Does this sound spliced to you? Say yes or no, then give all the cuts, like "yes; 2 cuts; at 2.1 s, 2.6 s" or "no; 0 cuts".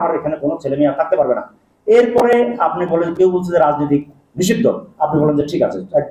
no; 0 cuts